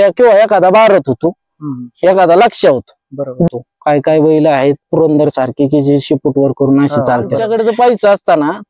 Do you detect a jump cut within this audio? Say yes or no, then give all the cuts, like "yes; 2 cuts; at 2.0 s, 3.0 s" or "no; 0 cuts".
yes; 2 cuts; at 3.5 s, 7.4 s